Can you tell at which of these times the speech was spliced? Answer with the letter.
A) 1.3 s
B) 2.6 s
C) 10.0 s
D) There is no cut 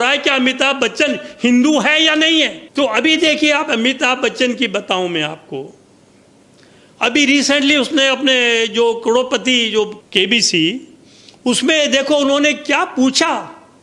B